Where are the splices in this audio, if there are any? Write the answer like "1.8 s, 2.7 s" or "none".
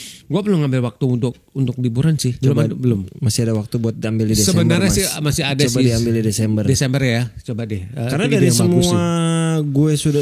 2.4 s